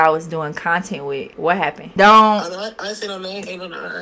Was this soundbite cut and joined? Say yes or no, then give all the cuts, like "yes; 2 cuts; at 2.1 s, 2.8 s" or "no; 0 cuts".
yes; 1 cut; at 1.6 s